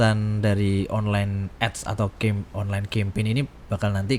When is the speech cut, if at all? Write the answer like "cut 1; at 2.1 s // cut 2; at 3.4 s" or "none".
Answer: none